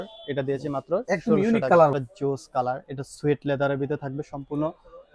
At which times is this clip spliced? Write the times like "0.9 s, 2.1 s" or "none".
1.9 s